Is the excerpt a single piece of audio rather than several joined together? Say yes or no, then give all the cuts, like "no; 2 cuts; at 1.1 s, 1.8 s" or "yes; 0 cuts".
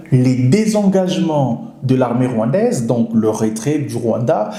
yes; 0 cuts